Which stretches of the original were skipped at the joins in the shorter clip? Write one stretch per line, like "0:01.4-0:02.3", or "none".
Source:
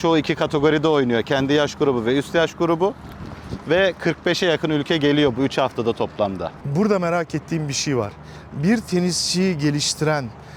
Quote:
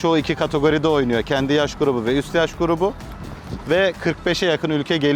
none